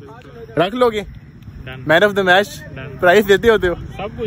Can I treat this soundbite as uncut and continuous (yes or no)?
yes